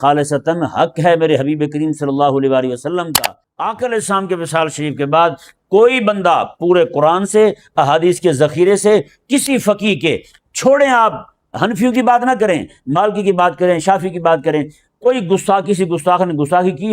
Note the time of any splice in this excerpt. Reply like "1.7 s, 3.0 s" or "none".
3.2 s